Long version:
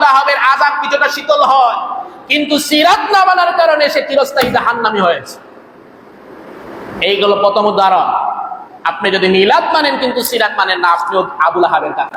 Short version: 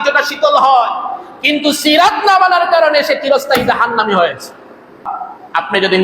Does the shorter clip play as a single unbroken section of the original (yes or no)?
no